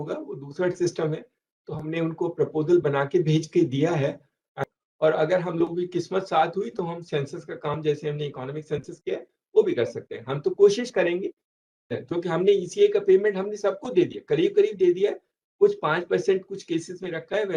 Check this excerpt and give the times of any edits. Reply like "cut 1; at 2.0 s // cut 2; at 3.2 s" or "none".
cut 1; at 4.5 s // cut 2; at 11.9 s